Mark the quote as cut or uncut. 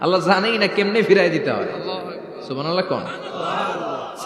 uncut